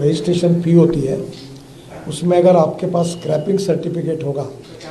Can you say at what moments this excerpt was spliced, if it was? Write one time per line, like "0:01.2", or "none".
none